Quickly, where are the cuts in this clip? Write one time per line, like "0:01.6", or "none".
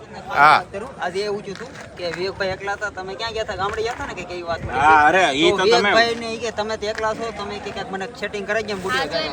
none